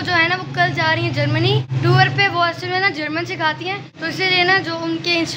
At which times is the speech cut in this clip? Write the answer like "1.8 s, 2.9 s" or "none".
1.7 s, 3.9 s